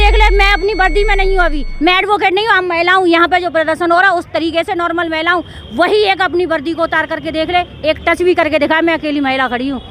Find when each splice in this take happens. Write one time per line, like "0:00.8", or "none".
none